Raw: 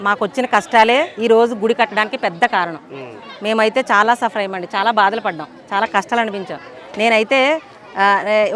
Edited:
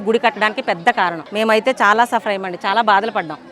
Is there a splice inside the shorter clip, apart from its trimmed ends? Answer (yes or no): yes